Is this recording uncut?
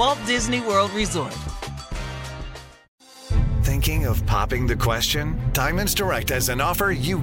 no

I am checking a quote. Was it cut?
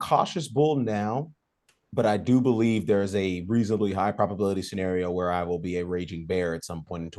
no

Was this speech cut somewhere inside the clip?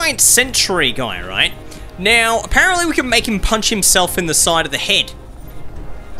no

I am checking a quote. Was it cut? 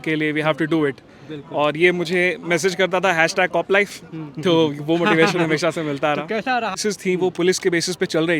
yes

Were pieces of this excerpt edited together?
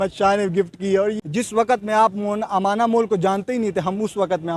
yes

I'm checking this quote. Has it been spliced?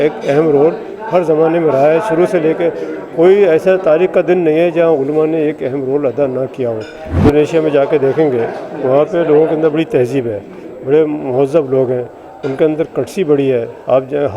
yes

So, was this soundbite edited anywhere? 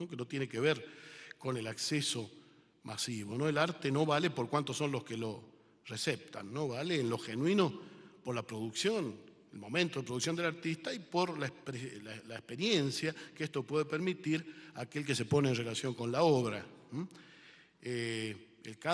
no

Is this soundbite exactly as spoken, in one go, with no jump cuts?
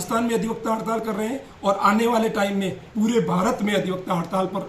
no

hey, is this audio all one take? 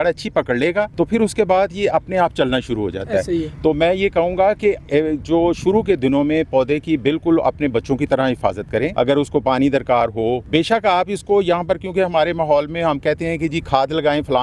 no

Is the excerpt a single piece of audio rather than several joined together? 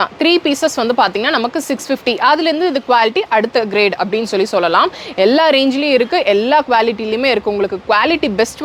yes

